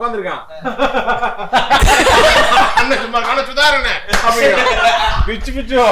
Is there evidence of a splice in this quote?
no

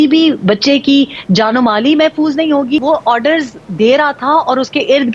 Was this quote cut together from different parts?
yes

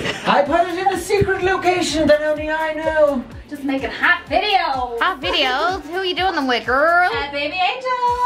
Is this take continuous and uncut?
no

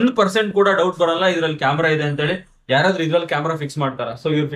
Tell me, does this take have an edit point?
no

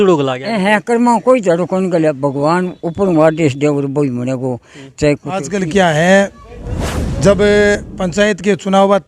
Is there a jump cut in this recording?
yes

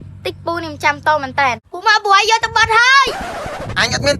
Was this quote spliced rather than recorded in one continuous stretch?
yes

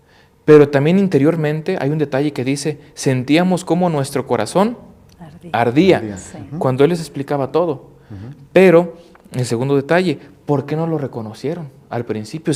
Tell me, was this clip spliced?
no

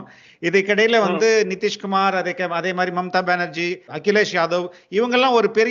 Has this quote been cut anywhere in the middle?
yes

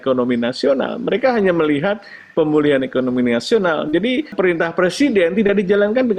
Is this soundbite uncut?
no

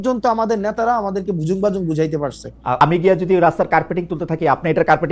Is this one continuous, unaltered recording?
no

